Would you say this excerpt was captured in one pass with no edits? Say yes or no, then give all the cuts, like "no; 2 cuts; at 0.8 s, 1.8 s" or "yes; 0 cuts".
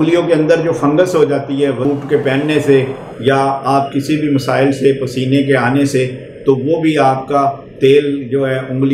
yes; 0 cuts